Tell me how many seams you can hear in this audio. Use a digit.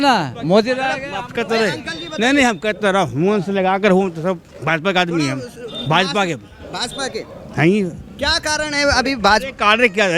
0